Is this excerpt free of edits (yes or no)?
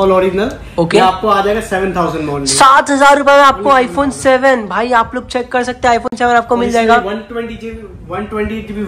yes